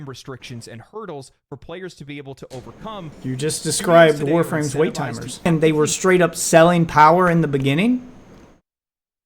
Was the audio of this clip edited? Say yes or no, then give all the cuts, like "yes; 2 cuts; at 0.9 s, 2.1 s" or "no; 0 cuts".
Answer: yes; 2 cuts; at 3.2 s, 5.5 s